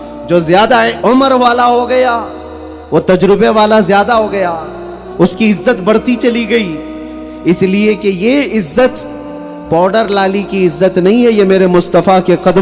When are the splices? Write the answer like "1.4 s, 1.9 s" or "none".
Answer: 0.9 s